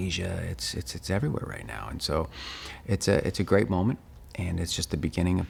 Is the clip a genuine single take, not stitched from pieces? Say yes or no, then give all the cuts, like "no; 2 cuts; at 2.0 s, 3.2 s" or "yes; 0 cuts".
yes; 0 cuts